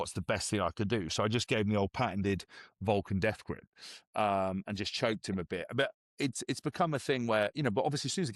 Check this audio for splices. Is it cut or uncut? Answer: uncut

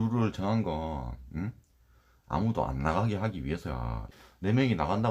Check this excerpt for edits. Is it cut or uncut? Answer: cut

